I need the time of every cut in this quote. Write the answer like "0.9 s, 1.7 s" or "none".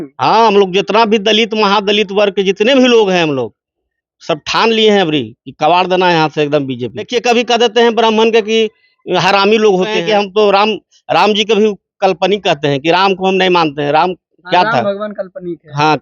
7.1 s, 10.0 s